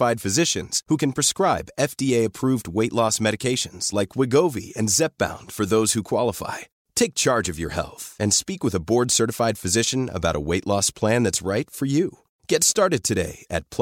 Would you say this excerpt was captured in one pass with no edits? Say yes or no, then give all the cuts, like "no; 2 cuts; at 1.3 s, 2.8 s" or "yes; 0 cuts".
yes; 0 cuts